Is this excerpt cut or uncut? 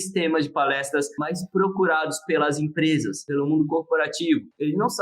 cut